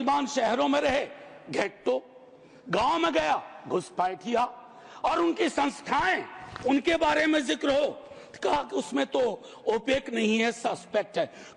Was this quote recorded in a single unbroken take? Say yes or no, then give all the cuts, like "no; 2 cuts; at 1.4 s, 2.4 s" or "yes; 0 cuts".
yes; 0 cuts